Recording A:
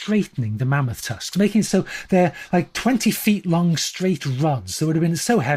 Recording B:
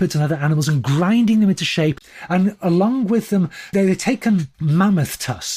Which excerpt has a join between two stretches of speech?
B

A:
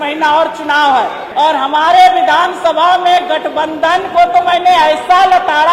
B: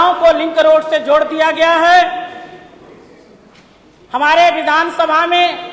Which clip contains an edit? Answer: A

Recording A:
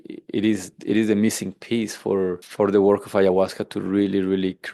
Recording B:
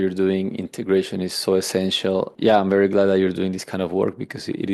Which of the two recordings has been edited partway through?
B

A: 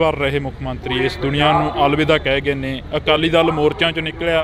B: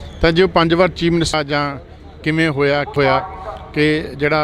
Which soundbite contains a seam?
B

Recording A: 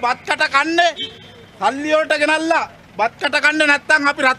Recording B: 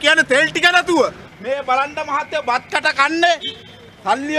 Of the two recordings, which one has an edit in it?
B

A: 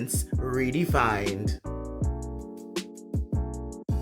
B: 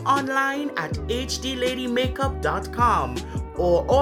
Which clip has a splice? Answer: A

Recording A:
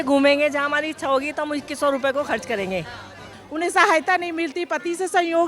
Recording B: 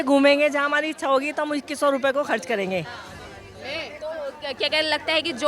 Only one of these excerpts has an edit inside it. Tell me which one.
A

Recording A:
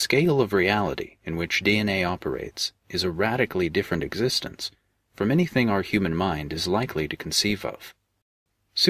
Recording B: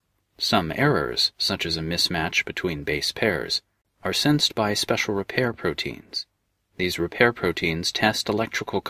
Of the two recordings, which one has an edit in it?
A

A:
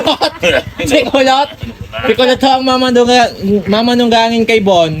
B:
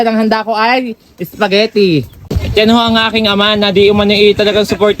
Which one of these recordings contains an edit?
B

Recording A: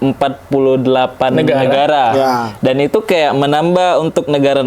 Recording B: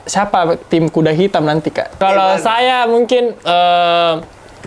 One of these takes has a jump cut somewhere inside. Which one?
B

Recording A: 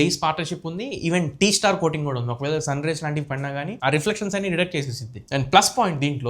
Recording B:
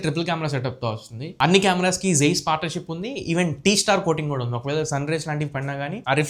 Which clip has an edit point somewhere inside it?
A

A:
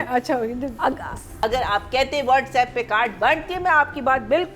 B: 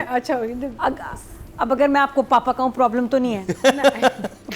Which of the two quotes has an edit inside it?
A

